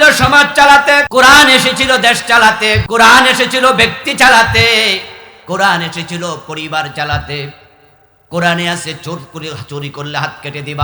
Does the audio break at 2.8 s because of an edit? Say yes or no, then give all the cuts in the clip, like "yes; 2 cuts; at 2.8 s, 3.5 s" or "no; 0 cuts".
yes; 2 cuts; at 1.1 s, 2.8 s